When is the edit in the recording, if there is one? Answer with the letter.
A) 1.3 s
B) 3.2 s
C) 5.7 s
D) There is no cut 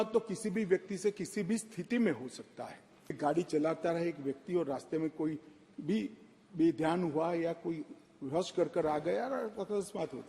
B